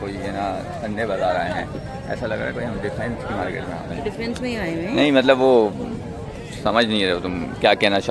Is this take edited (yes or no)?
no